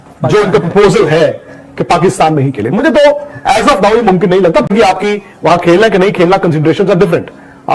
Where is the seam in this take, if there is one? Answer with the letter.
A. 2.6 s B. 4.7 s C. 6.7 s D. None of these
B